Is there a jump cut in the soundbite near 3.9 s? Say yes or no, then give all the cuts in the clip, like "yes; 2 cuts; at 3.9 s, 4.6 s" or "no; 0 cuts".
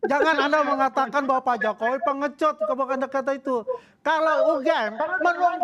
no; 0 cuts